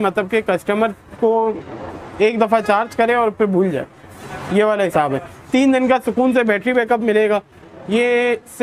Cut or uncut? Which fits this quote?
uncut